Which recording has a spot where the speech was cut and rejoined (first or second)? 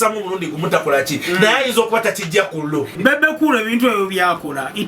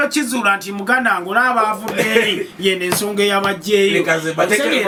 first